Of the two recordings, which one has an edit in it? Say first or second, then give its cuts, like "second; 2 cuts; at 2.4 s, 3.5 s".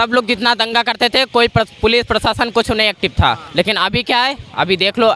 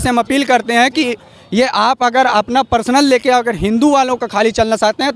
first; 1 cut; at 3.4 s